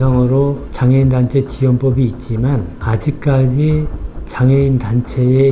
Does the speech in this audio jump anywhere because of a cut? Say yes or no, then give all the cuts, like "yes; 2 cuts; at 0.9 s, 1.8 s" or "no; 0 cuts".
no; 0 cuts